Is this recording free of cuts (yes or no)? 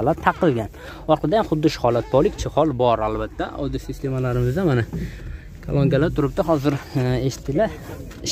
yes